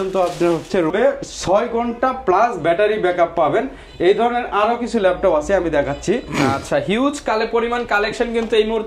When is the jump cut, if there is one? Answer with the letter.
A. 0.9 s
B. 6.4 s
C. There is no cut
A